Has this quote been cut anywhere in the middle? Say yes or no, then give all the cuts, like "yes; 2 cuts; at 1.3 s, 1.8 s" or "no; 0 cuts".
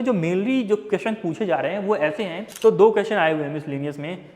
yes; 1 cut; at 2.4 s